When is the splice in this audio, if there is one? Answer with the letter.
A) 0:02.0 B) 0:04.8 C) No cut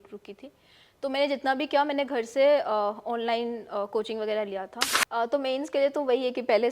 B